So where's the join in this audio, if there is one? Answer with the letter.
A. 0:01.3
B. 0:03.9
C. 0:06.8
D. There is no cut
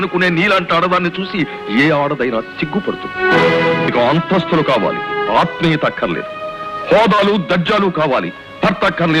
B